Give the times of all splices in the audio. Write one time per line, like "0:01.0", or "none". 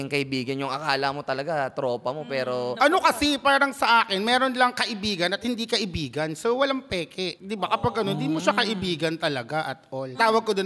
0:02.8